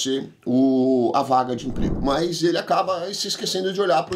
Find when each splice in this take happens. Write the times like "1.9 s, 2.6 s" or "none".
2.0 s